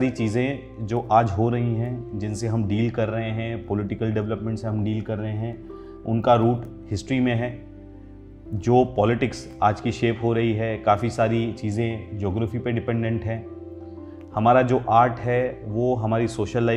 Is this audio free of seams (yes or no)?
yes